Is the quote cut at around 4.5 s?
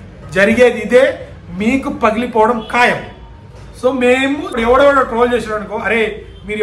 yes; 1 cut; at 4.5 s

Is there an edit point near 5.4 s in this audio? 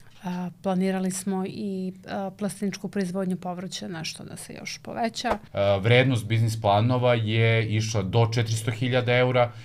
yes; 1 cut; at 5.4 s

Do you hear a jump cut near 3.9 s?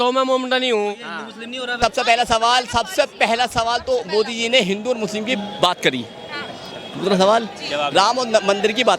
no; 1 cut; at 1.8 s

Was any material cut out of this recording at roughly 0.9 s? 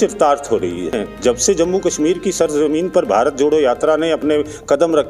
yes; 1 cut; at 0.9 s

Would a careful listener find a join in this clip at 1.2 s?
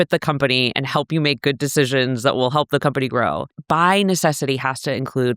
no; 1 cut; at 3.5 s

